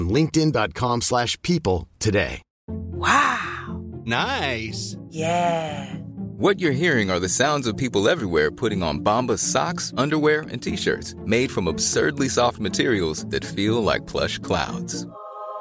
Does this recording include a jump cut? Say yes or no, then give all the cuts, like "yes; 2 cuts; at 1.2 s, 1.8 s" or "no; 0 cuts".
yes; 1 cut; at 2.5 s